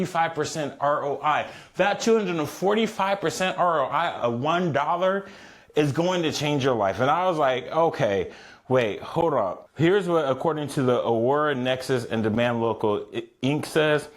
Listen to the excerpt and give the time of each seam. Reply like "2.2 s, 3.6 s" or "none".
9.6 s